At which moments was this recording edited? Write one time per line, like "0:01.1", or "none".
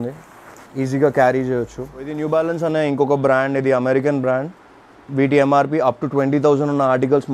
0:02.2